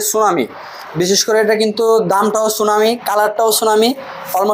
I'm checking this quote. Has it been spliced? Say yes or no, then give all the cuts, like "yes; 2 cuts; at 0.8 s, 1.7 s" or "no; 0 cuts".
no; 0 cuts